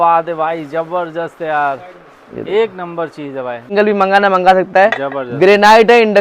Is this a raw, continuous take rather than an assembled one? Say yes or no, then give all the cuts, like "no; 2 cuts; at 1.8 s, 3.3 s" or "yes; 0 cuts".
no; 1 cut; at 3.7 s